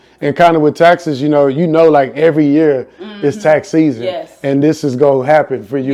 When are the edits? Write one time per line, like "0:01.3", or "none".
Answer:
none